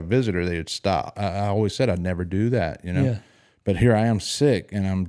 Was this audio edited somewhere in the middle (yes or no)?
yes